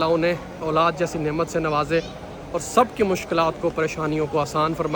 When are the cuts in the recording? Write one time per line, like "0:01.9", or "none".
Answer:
none